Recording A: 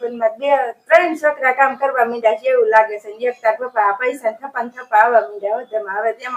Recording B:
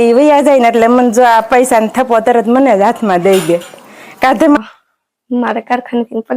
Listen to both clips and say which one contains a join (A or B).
B